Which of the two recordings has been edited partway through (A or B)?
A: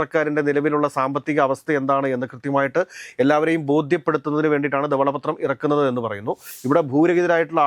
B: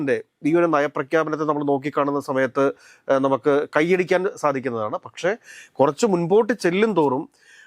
A